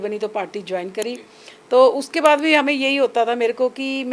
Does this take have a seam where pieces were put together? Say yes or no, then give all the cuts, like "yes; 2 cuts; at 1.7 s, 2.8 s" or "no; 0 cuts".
no; 0 cuts